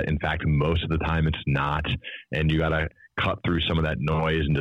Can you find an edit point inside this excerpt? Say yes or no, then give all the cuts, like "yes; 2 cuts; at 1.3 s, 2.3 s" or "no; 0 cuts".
yes; 1 cut; at 2.9 s